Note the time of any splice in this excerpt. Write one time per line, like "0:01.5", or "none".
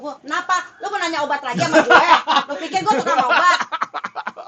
none